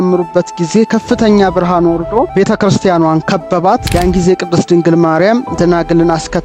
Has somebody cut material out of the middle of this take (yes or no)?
yes